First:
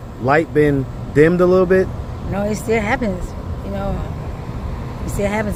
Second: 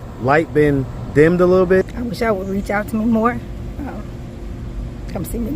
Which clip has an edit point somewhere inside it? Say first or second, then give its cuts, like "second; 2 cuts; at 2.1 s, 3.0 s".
second; 1 cut; at 1.9 s